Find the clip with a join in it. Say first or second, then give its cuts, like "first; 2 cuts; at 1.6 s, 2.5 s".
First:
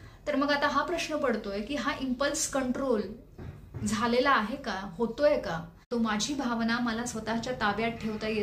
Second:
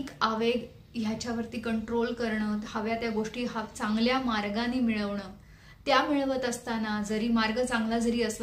first; 1 cut; at 5.9 s